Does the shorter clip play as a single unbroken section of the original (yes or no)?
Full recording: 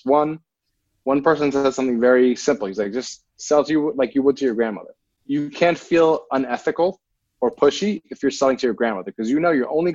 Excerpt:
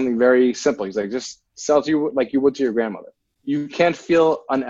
yes